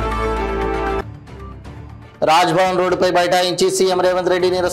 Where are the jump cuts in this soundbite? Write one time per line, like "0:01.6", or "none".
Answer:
0:01.0